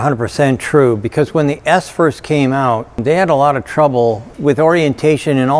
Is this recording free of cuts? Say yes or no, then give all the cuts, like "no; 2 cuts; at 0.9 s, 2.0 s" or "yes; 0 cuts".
yes; 0 cuts